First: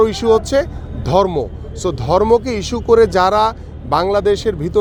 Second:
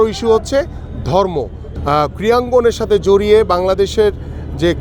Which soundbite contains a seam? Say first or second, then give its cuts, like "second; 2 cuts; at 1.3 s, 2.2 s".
second; 1 cut; at 1.7 s